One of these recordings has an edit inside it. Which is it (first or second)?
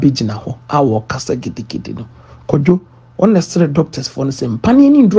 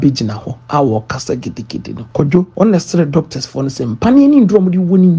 second